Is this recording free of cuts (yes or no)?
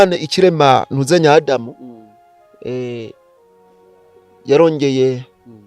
yes